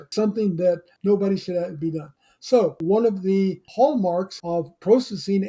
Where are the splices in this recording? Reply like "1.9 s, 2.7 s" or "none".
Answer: 2.8 s, 4.4 s